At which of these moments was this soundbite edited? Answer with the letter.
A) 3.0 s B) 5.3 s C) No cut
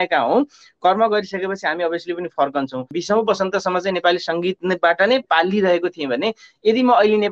A